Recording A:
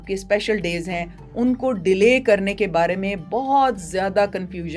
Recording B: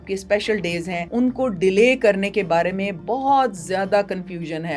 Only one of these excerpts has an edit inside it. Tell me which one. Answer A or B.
B